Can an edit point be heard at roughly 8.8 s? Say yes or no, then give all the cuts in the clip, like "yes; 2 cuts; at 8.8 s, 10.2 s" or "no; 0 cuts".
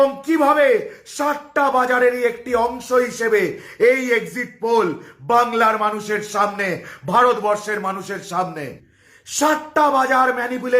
yes; 1 cut; at 8.8 s